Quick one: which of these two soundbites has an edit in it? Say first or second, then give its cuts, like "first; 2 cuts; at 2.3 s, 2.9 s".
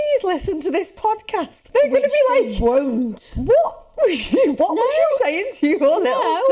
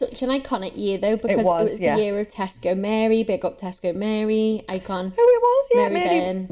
first; 1 cut; at 1.6 s